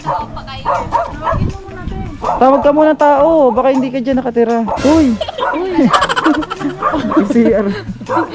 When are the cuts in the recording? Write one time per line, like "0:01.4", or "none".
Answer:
0:04.7

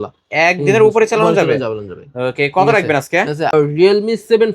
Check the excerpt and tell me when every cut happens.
0:03.6

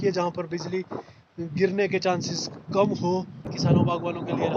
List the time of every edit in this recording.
0:03.5

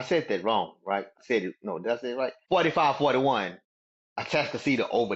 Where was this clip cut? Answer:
0:01.1
0:02.4

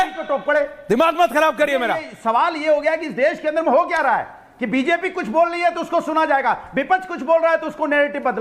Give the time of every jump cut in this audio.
0:01.9

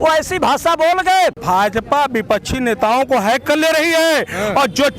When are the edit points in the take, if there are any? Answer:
0:01.4

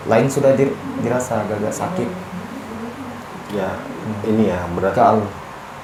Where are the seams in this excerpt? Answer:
none

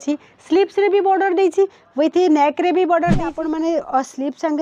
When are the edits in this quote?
0:03.3

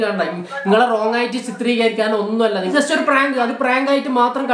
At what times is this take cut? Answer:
0:02.7

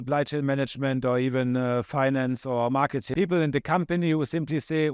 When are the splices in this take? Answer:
0:03.1

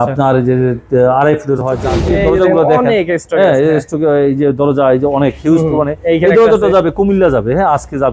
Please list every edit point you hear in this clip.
0:01.9

